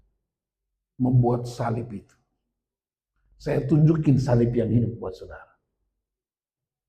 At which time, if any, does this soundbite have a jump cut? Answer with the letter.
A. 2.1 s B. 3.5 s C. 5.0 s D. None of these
D